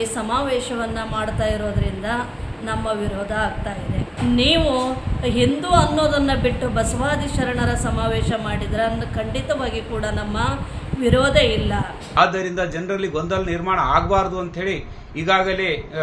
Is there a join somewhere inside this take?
yes; 2 cuts; at 4.1 s, 12.0 s

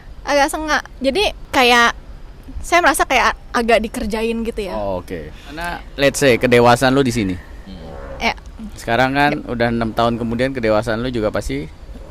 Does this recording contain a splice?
yes; 1 cut; at 5.8 s

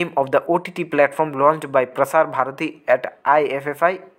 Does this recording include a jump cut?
no; 0 cuts

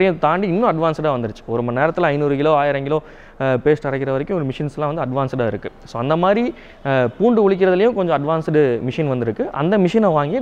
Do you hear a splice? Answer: no; 0 cuts

